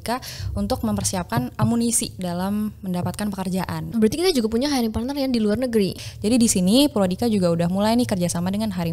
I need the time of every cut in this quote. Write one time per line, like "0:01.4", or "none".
0:03.8
0:05.9